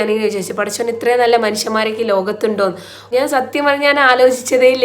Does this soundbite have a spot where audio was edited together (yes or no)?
yes